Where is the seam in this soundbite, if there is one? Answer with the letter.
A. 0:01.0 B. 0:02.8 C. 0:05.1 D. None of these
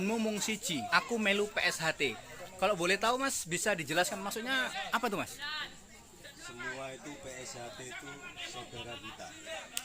A